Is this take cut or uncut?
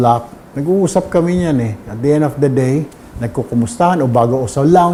uncut